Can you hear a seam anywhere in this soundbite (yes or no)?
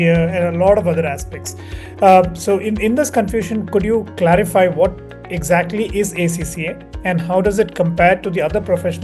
no